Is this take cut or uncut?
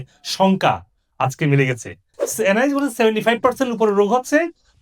cut